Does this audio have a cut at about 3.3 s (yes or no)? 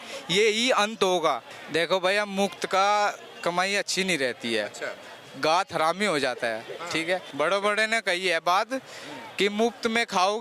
no